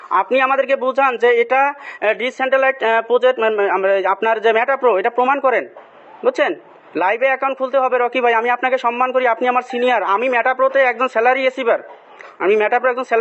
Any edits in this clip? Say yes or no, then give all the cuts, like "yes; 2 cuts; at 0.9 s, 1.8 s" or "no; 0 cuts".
no; 0 cuts